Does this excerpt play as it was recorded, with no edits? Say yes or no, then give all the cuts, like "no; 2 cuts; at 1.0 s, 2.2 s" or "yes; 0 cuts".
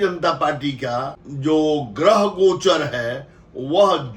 no; 1 cut; at 1.2 s